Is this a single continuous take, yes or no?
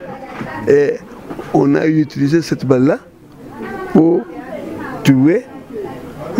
yes